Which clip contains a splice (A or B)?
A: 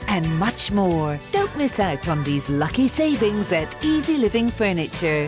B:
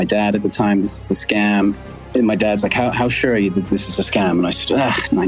B